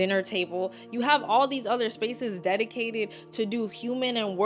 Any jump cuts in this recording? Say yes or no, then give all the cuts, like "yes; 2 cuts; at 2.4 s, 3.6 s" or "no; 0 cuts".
no; 0 cuts